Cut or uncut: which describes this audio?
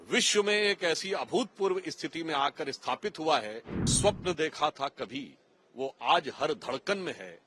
cut